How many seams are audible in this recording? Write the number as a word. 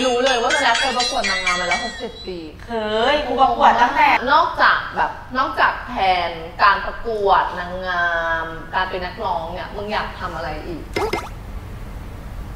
one